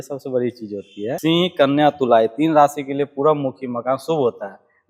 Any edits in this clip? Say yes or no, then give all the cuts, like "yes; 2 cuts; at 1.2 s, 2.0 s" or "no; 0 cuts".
yes; 1 cut; at 1.2 s